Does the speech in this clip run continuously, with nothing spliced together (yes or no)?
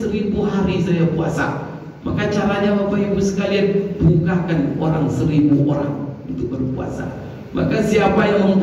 yes